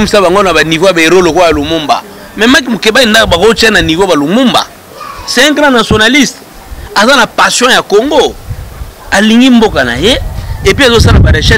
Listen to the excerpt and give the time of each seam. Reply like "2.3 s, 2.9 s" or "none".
none

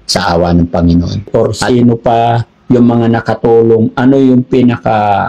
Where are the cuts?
1.6 s

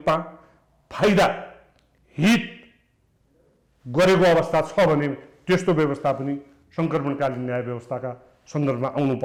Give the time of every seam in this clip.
none

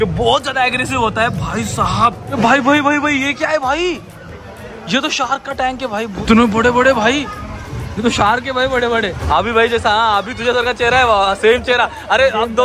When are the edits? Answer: 2.2 s, 6.2 s, 9.2 s

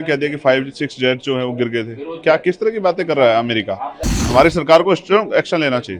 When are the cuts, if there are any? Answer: 4.2 s

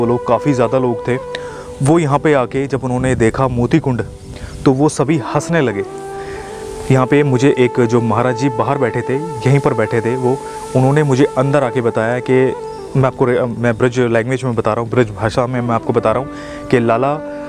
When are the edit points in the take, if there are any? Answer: none

